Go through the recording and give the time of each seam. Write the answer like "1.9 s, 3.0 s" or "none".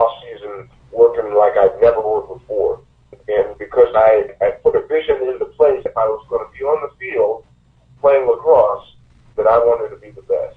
3.2 s, 4.3 s, 5.9 s